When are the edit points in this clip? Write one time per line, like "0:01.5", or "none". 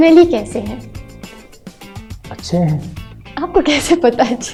none